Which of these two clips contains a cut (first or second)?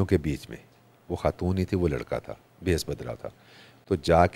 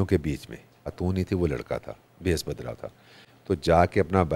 second